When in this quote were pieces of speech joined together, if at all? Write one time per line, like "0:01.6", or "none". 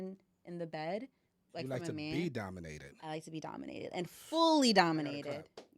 none